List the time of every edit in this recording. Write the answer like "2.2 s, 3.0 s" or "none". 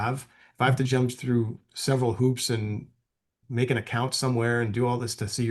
3.4 s